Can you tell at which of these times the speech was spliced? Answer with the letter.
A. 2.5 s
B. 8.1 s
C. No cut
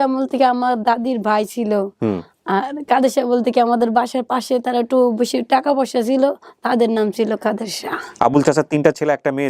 B